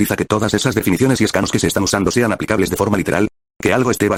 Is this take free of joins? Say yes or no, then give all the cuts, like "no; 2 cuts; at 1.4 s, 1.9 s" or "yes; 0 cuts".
yes; 0 cuts